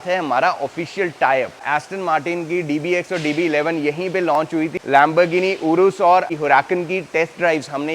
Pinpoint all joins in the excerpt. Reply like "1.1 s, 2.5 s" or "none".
1.6 s, 4.8 s, 6.3 s